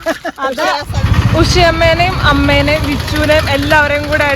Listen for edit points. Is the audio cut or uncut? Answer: cut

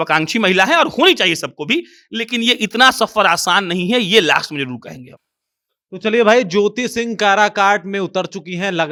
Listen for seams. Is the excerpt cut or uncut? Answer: uncut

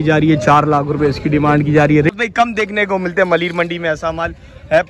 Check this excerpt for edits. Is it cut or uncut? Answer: cut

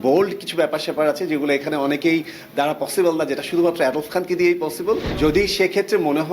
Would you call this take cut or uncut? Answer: cut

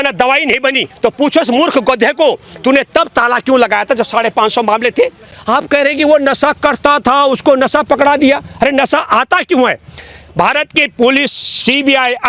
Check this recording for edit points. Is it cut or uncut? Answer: cut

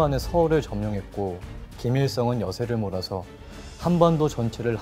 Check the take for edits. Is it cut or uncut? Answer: uncut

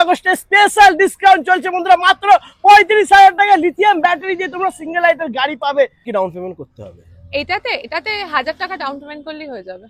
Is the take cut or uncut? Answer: cut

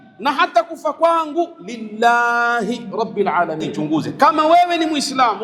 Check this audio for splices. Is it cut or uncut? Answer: cut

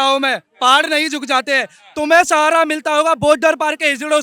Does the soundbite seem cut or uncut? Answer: uncut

